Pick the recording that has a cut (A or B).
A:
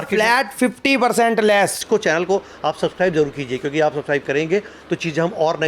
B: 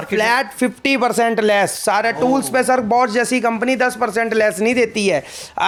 A